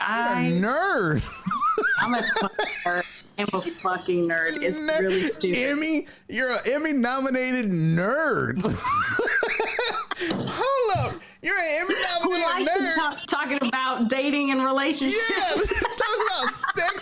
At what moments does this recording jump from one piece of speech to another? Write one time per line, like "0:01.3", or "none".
0:13.2